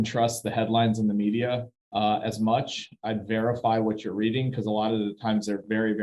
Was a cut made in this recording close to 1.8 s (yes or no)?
yes